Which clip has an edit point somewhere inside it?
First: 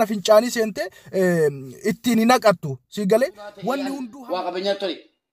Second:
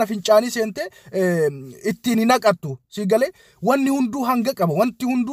first; 1 cut; at 4.0 s

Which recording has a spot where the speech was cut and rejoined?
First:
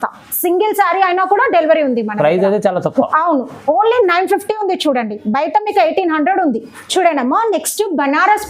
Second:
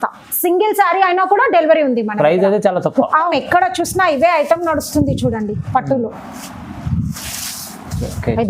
second; 1 cut; at 3.3 s

